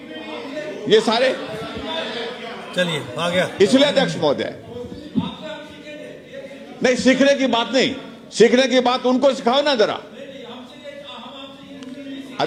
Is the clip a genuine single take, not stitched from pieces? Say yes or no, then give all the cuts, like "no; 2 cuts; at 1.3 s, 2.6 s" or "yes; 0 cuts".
yes; 0 cuts